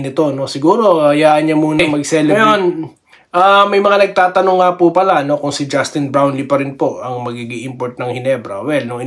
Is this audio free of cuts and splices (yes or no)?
no